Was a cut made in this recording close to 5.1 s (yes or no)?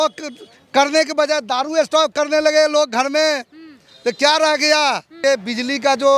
yes